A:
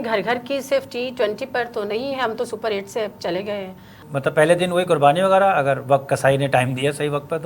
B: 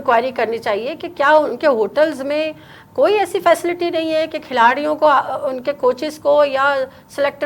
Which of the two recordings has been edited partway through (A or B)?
A